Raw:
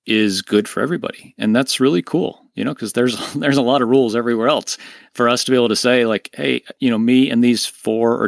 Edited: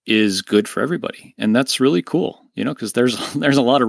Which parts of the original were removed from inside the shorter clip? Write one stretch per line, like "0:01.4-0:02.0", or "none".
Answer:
none

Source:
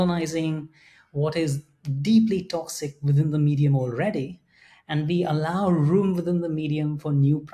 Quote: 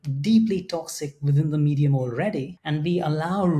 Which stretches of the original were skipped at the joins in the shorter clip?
0:04.4-0:04.8

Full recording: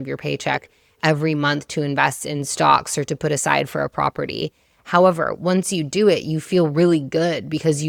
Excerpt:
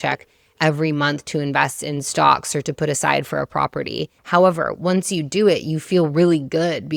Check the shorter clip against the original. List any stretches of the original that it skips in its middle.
0:04.6-0:04.7

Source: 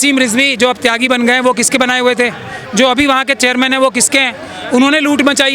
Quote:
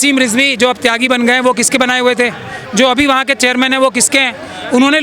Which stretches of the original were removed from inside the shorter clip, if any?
none

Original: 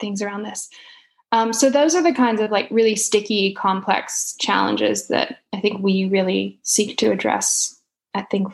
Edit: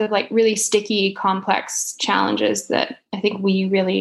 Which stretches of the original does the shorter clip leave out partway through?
none

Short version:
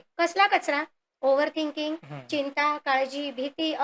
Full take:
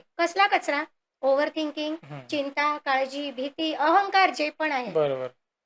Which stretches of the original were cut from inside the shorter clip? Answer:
none

